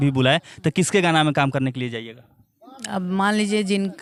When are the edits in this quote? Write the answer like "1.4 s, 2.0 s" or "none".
none

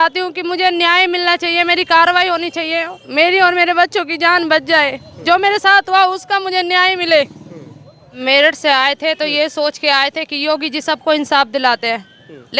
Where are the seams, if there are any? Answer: 8.2 s

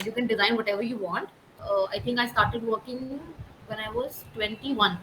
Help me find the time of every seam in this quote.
1.5 s

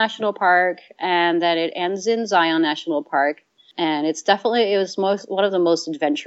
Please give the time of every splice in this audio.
3.6 s

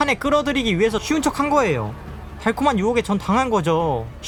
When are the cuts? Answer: none

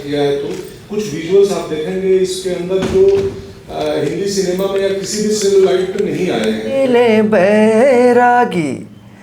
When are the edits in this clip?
6.8 s

